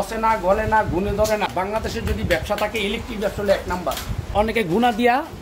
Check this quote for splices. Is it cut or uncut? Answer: cut